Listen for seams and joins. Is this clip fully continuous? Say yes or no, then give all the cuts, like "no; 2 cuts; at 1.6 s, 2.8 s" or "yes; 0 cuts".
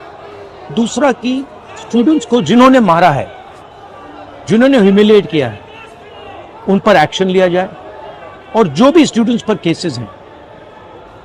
yes; 0 cuts